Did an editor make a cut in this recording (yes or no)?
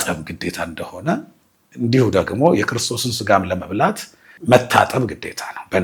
no